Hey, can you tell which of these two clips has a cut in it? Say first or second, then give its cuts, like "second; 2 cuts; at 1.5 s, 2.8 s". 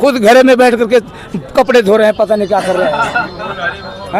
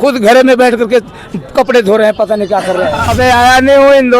second; 1 cut; at 3.1 s